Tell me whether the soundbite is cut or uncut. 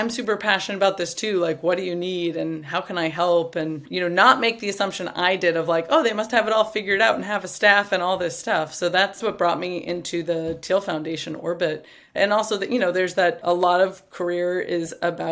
uncut